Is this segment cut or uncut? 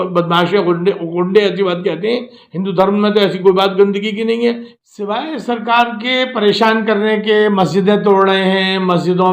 cut